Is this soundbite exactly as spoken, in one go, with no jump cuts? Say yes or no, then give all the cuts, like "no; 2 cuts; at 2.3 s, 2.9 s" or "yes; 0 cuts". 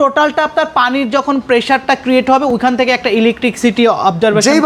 yes; 0 cuts